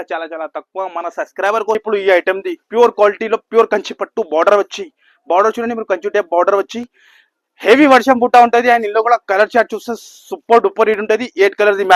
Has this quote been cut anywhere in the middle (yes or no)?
yes